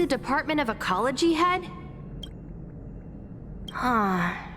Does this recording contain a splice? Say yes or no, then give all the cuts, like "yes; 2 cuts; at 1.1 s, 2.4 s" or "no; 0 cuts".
yes; 2 cuts; at 1.7 s, 3.7 s